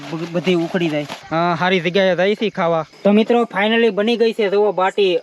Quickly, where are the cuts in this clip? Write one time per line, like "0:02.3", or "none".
0:01.2
0:02.9